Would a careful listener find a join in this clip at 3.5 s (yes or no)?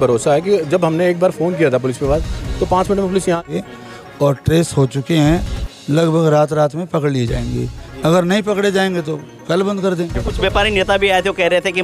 yes